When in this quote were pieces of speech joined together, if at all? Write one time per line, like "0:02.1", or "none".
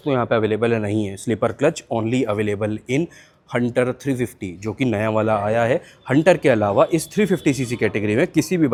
none